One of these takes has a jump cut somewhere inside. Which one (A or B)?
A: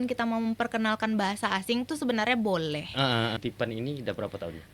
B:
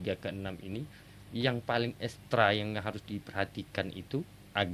A